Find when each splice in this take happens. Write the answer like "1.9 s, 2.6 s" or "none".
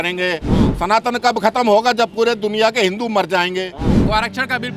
3.9 s